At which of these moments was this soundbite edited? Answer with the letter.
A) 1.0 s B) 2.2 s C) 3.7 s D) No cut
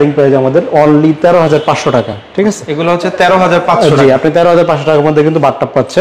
D